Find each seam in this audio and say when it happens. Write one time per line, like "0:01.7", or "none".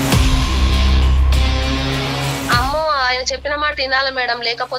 0:02.4